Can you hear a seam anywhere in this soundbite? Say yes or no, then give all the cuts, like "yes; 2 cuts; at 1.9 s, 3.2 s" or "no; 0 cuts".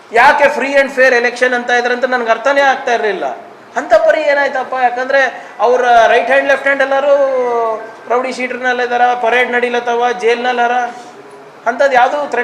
no; 0 cuts